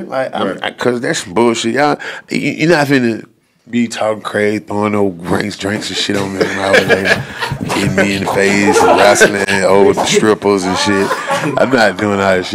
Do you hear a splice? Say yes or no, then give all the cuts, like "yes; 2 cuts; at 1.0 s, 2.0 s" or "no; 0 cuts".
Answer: no; 0 cuts